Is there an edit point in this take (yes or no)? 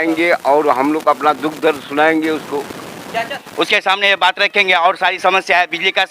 yes